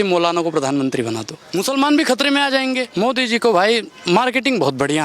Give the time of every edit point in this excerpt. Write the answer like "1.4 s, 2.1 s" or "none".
1.3 s, 2.9 s